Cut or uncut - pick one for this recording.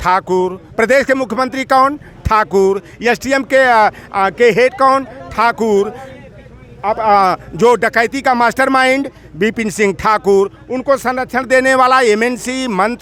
uncut